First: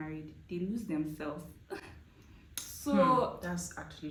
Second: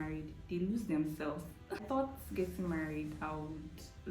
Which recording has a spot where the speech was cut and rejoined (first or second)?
second